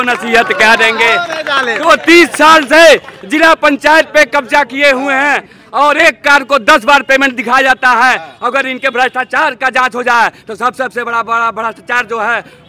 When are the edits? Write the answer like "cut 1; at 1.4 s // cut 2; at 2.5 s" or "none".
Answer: none